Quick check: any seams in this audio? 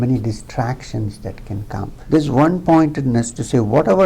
yes; 1 cut; at 1.9 s

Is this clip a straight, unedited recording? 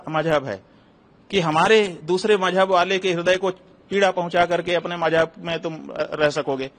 yes; 0 cuts

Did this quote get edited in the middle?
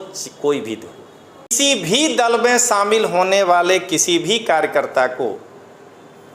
yes; 1 cut; at 1.5 s

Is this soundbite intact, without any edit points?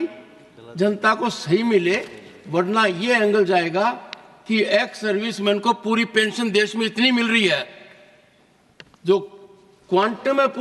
yes; 0 cuts

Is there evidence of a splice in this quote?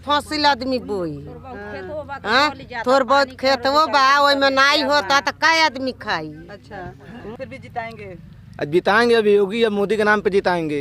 yes; 1 cut; at 7.2 s

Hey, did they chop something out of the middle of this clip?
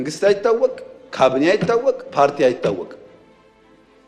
no; 0 cuts

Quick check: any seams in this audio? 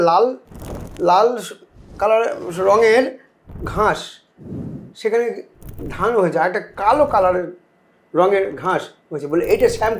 no; 0 cuts

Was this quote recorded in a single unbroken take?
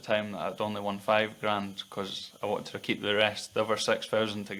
yes; 0 cuts

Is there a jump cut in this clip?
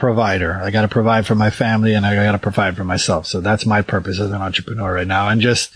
no; 0 cuts

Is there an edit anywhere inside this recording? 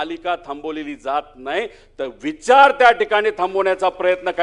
no; 0 cuts

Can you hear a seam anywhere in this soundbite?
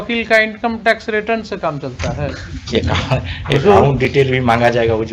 no; 0 cuts

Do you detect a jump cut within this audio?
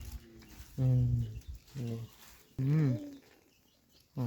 yes; 1 cut; at 2.6 s

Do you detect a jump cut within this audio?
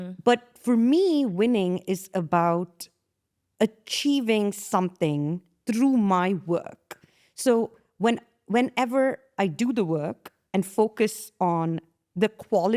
no; 0 cuts

